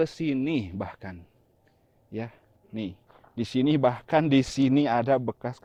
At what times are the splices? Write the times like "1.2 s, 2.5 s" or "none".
none